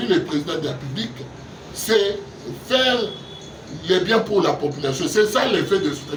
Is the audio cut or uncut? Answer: uncut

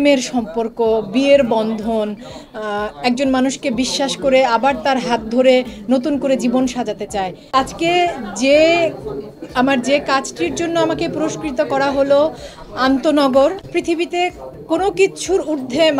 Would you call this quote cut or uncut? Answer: cut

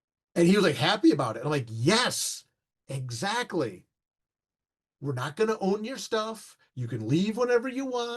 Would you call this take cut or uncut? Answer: uncut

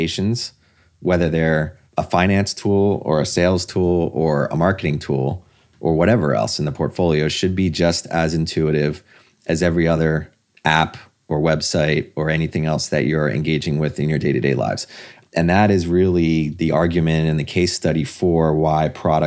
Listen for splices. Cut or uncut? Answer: cut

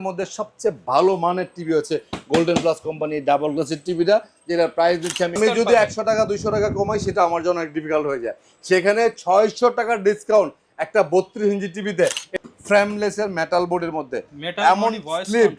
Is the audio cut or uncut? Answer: cut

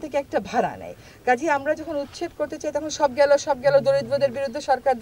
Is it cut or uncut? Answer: uncut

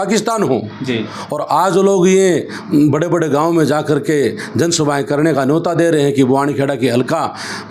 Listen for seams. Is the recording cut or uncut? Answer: uncut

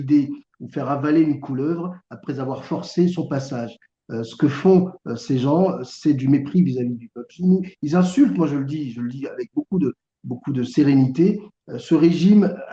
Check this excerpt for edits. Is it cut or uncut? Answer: uncut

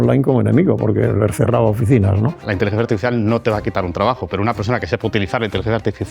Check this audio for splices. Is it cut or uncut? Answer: cut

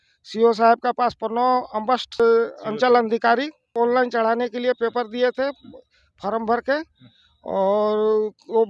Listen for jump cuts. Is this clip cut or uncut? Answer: cut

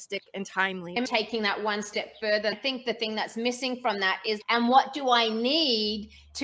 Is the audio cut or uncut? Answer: cut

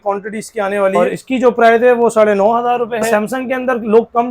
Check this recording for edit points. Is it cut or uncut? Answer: cut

